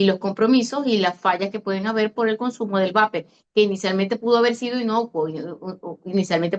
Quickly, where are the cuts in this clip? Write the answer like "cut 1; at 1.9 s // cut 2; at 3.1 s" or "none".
none